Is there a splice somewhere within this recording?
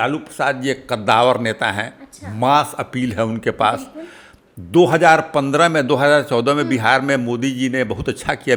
no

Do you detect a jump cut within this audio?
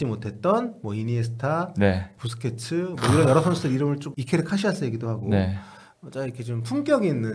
yes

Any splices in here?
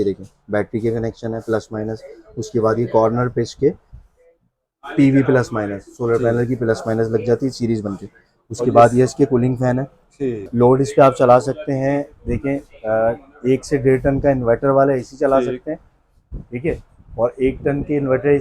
yes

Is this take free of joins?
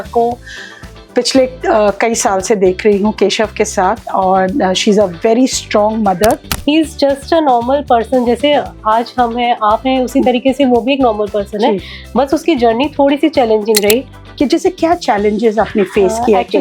no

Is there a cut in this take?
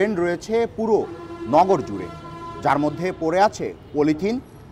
no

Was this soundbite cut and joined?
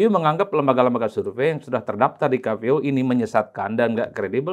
no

